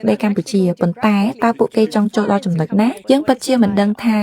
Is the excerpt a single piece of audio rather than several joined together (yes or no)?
no